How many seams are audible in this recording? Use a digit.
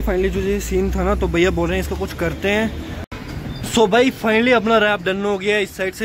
1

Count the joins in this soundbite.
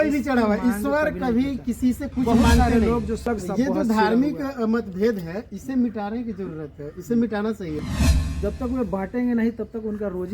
2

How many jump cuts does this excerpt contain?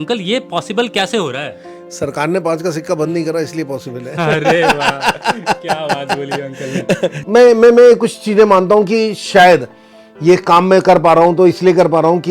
1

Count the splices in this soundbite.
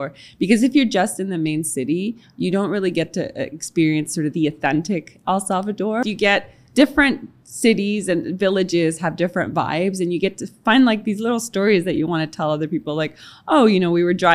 2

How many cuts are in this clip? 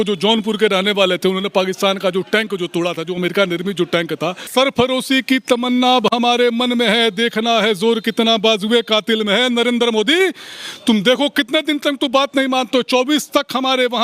1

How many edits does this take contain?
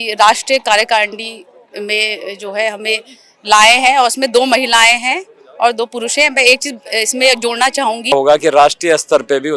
1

